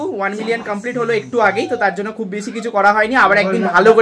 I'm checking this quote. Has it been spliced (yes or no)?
no